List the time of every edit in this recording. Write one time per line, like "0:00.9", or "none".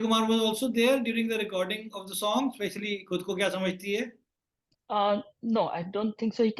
none